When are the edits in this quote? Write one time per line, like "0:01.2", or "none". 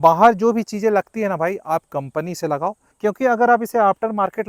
0:02.9

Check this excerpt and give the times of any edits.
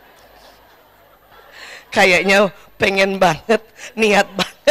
0:01.3

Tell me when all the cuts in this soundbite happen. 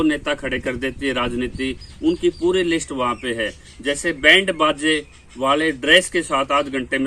none

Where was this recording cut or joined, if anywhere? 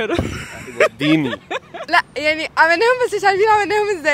none

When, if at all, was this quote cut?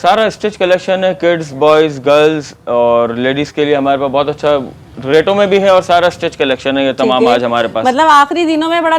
none

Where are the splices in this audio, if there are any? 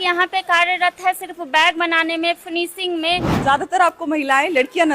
0:03.3

